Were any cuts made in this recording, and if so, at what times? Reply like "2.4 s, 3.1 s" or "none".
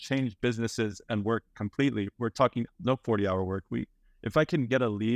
2.4 s